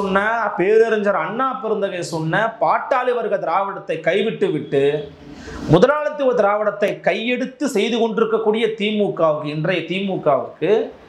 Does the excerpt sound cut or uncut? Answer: uncut